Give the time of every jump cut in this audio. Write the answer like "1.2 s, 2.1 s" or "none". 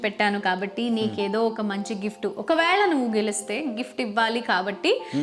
none